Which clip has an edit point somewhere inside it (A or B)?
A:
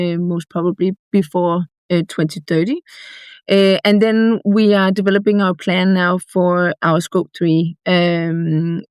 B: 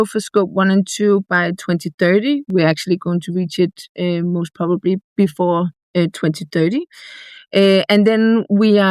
B